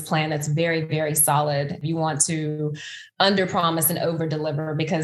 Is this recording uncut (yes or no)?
no